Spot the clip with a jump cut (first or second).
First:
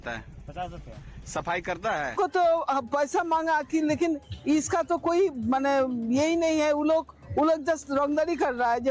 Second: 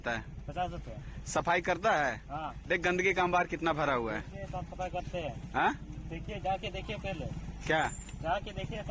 first